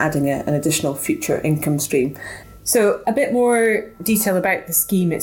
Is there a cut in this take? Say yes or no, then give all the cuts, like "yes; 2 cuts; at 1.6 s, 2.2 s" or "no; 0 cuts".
no; 0 cuts